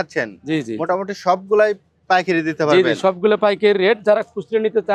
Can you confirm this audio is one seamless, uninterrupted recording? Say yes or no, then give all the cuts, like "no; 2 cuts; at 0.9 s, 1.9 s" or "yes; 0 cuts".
yes; 0 cuts